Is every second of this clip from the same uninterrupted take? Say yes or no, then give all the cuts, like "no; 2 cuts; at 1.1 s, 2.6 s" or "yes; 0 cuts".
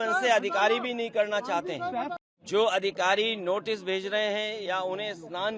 no; 1 cut; at 2.2 s